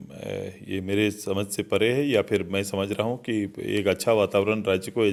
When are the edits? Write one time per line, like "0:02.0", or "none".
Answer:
none